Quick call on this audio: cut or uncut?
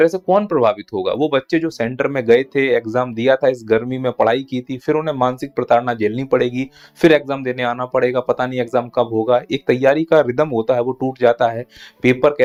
uncut